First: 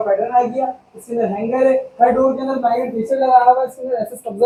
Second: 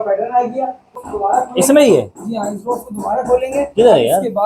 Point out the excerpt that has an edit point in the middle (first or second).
second